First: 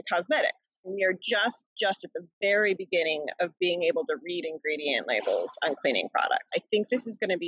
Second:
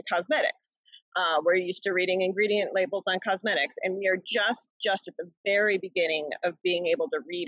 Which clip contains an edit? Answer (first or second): first